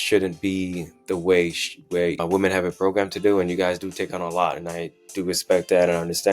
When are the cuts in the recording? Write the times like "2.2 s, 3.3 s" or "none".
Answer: 2.2 s

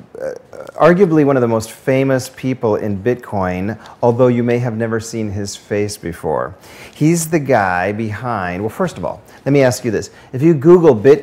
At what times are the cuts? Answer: 7.4 s

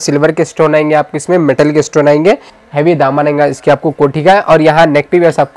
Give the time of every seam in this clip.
2.6 s

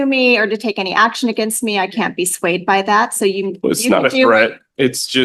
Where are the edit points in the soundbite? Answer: none

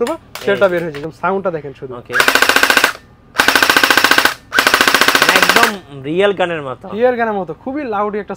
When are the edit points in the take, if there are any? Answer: 1.0 s

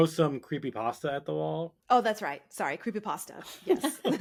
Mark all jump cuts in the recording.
none

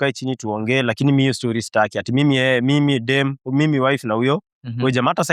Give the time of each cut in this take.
none

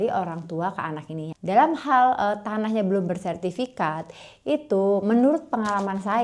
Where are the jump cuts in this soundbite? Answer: 1.3 s

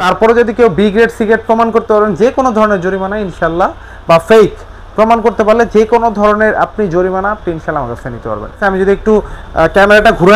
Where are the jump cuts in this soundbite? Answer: 8.6 s

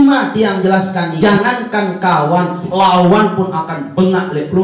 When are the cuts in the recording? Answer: 1.1 s

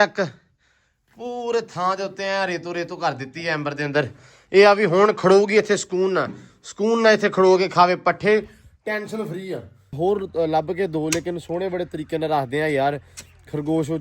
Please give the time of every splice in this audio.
9.9 s

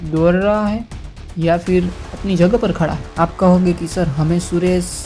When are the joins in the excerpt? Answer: none

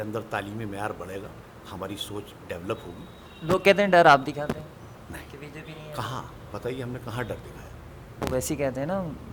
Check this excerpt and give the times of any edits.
none

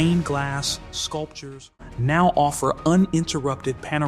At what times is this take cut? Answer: 1.9 s

